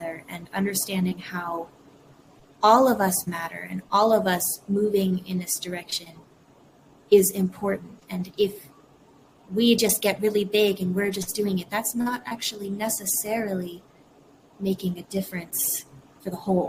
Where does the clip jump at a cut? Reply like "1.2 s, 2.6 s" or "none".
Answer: none